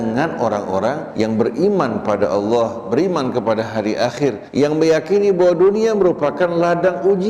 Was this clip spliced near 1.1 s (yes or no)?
yes